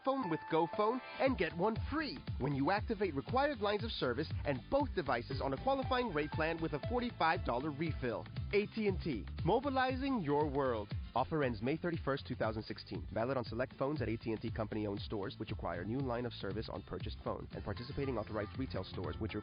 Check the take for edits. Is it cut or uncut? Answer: cut